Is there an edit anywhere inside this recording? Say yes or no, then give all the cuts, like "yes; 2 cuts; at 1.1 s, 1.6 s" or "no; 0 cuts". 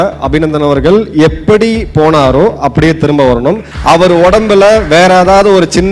yes; 1 cut; at 3.7 s